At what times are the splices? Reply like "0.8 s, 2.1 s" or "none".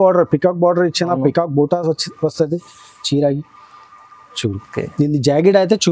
none